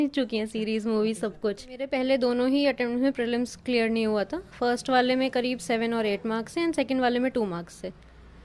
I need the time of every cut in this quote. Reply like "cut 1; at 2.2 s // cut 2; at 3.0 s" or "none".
cut 1; at 1.9 s